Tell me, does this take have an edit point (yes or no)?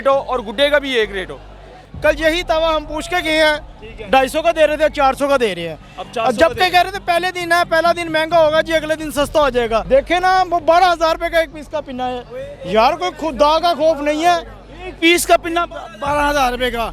yes